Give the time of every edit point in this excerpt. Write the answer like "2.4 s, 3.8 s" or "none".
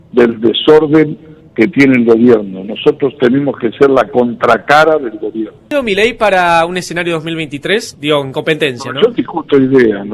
5.7 s